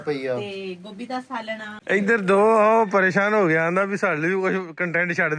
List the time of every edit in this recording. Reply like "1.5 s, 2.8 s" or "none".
1.7 s